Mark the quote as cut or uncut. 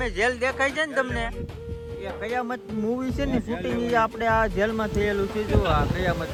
uncut